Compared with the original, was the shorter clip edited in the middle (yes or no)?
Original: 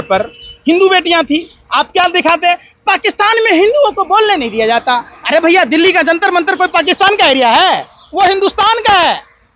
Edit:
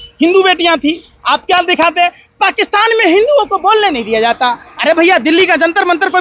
no